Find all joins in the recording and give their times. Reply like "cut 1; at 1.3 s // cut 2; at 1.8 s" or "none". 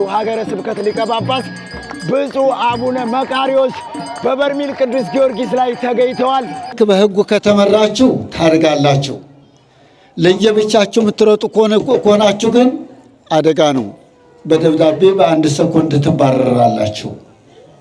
cut 1; at 6.7 s

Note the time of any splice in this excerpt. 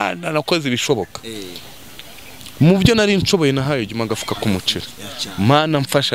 none

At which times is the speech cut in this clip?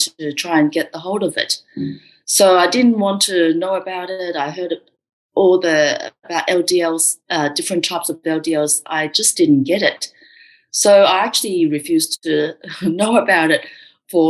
none

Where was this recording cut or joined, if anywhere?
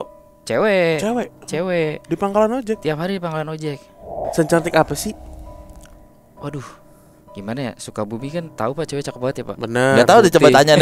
cut 1; at 4.2 s

